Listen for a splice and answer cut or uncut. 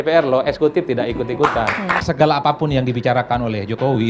cut